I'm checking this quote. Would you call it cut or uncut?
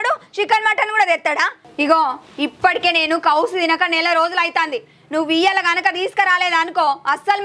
cut